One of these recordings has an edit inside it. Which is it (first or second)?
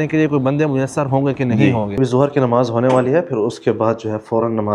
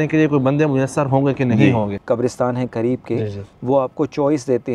second